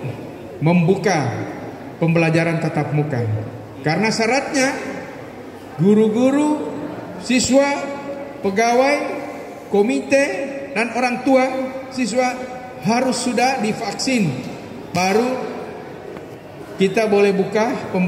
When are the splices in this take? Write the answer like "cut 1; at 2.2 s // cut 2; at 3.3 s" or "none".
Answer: none